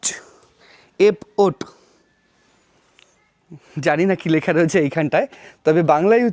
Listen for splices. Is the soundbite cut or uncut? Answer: uncut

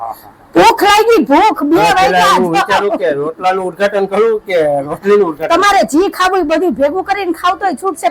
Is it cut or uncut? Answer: uncut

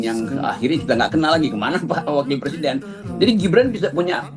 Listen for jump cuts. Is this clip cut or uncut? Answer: uncut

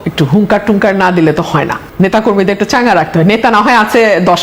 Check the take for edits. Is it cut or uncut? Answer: uncut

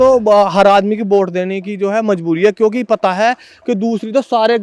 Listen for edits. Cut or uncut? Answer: uncut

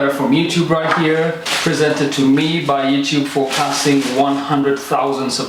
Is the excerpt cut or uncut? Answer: uncut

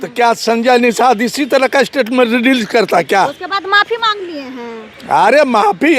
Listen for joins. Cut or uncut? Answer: uncut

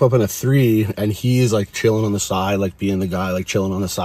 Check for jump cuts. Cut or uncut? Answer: uncut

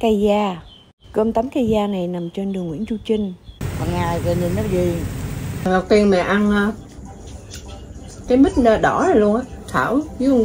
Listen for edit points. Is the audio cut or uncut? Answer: cut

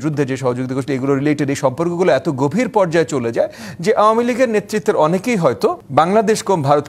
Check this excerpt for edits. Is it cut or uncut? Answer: cut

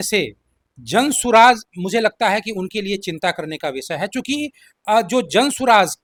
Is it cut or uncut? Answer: uncut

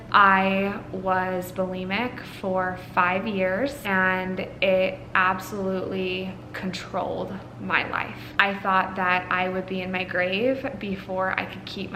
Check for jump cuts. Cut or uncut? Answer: cut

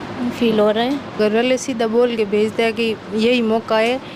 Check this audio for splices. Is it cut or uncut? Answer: cut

